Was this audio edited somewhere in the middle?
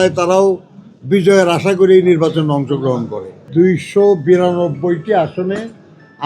yes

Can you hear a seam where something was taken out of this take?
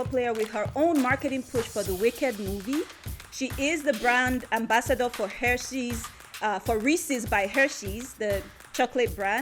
yes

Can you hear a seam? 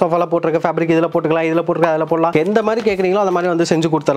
no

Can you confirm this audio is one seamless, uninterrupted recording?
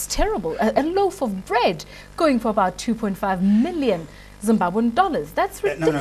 yes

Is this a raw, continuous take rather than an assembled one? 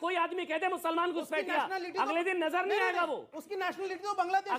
yes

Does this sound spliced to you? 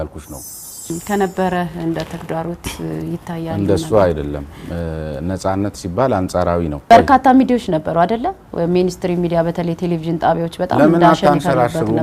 yes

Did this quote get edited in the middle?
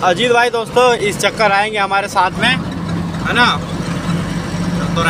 no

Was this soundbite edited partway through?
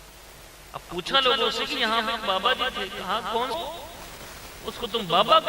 yes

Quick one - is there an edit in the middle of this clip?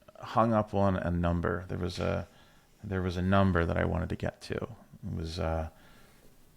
no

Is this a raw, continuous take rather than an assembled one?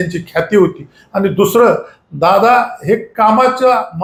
yes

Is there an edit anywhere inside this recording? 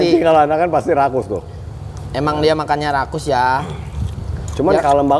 no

